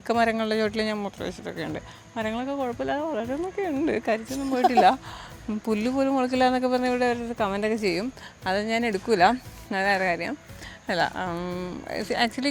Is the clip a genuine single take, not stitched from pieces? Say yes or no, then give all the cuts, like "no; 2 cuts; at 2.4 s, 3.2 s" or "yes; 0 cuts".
yes; 0 cuts